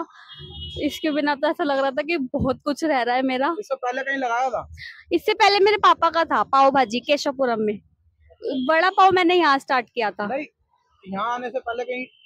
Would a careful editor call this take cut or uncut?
uncut